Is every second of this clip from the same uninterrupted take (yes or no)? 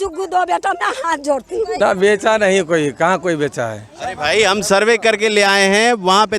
no